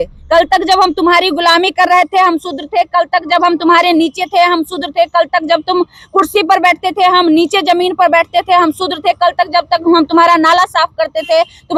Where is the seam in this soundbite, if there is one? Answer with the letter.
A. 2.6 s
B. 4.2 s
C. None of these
C